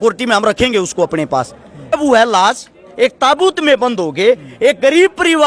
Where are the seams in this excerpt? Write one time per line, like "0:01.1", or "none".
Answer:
0:01.9

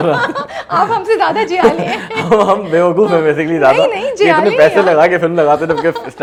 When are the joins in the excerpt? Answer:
none

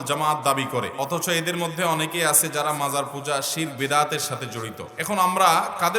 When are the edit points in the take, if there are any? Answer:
0:00.9
0:04.9

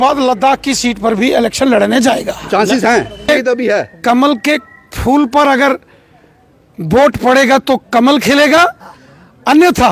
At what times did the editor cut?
0:03.3

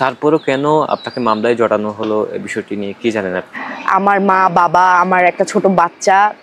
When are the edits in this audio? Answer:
0:03.5

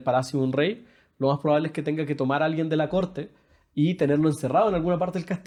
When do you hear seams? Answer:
none

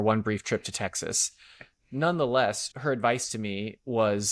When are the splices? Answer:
0:02.7

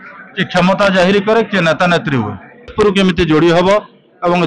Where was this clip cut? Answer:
0:02.7

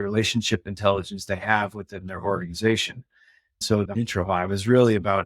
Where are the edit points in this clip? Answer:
0:03.7

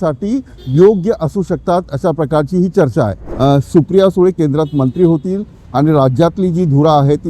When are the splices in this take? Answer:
0:03.2

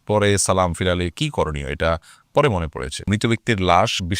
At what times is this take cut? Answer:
0:03.1

